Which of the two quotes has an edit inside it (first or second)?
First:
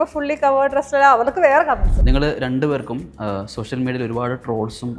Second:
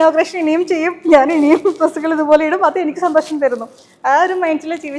first